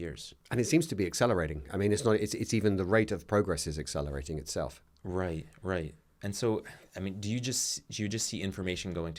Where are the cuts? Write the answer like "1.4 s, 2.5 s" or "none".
none